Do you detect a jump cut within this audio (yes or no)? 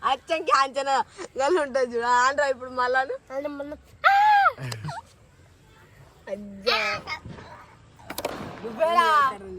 yes